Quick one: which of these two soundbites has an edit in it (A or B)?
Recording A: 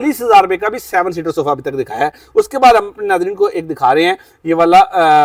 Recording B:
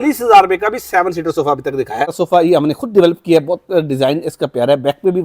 B